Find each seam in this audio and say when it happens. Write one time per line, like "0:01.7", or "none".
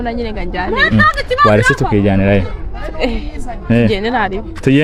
none